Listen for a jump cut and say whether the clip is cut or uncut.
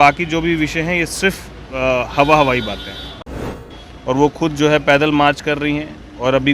cut